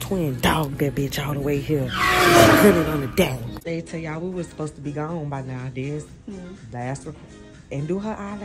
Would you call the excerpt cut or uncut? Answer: cut